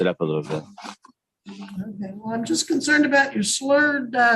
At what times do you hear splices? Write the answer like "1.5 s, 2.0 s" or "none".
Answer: none